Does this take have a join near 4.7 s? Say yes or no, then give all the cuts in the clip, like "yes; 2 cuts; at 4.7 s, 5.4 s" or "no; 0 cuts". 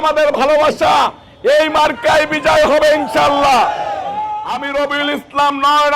yes; 1 cut; at 4.7 s